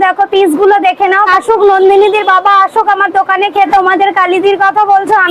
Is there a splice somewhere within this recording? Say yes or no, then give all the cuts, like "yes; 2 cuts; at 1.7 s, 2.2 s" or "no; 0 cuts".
yes; 2 cuts; at 1.3 s, 3.7 s